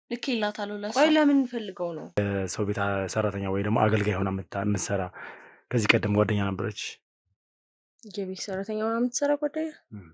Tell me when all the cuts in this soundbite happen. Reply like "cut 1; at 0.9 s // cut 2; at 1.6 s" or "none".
cut 1; at 2.2 s